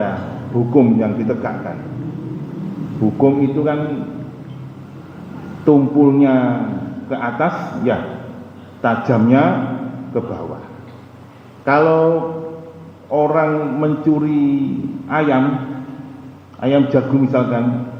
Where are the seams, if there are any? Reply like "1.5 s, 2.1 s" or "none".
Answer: none